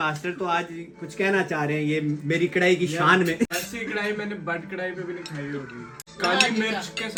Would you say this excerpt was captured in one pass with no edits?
yes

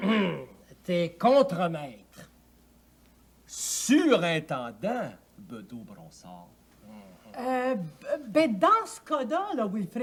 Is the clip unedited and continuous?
yes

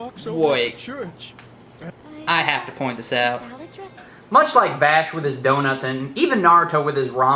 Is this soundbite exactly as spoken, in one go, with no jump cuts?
no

